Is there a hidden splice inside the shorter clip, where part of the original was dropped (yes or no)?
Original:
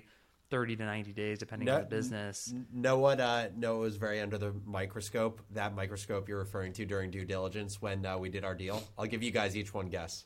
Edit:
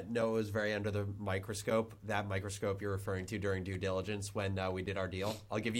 no